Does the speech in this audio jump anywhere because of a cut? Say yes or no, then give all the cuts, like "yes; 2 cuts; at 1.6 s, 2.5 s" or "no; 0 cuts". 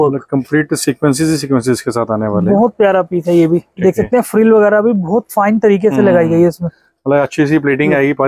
no; 0 cuts